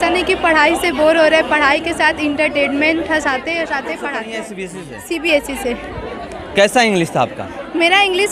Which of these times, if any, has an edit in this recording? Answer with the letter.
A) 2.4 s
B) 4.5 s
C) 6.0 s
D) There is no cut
B